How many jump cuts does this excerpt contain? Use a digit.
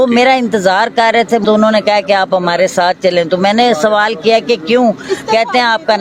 1